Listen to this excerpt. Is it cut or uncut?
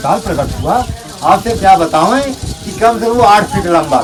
uncut